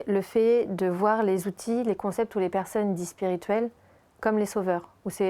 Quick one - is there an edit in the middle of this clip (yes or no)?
no